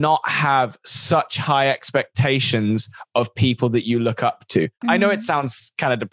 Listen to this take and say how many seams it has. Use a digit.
1